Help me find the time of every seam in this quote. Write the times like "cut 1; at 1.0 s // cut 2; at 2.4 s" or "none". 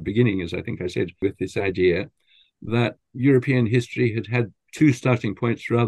cut 1; at 1.2 s // cut 2; at 3.0 s // cut 3; at 4.6 s